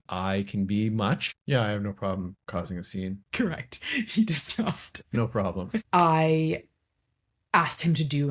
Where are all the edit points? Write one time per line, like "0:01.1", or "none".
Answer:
0:01.3
0:05.9